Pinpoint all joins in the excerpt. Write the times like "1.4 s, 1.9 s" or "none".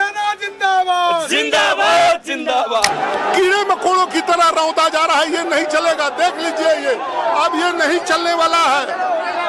2.9 s